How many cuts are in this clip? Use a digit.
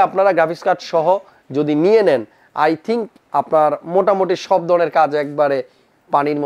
0